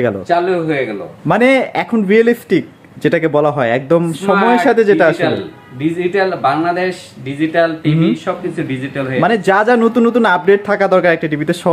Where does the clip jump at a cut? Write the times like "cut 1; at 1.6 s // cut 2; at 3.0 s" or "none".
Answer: none